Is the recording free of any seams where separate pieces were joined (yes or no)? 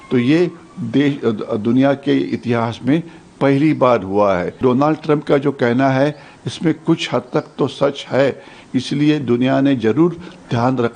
no